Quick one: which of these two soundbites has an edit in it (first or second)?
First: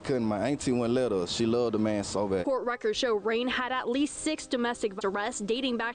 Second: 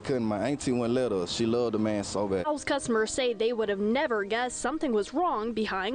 first